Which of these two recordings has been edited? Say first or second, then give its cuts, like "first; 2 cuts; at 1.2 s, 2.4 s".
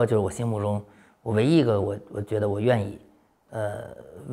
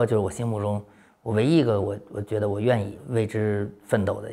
second; 1 cut; at 3.0 s